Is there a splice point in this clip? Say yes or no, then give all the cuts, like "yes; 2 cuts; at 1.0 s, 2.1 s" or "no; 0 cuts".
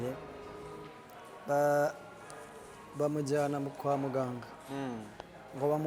no; 0 cuts